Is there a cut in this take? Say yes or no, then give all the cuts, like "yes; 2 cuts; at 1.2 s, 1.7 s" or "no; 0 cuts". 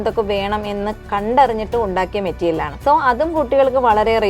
yes; 2 cuts; at 1.0 s, 2.7 s